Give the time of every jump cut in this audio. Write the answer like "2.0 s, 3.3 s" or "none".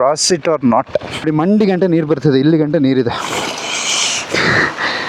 1.2 s